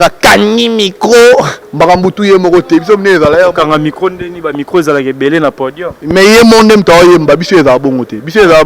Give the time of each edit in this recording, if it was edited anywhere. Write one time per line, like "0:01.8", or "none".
0:01.6